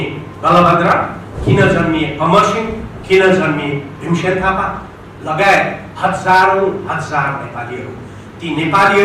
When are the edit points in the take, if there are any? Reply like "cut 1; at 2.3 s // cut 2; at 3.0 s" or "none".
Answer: none